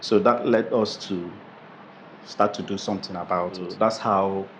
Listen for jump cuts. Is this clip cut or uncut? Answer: cut